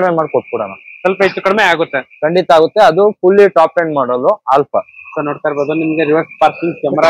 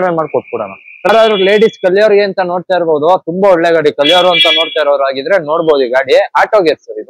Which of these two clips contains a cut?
second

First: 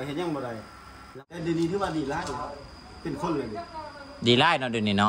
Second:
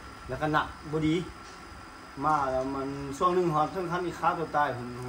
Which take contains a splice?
first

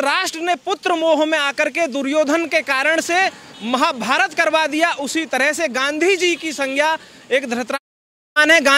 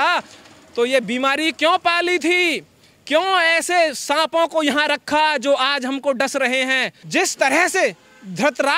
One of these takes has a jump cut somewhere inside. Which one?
second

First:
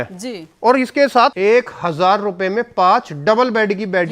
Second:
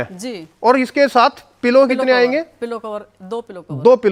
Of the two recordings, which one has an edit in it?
first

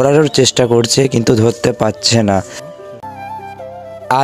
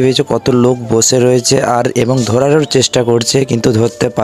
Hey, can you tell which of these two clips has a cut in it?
first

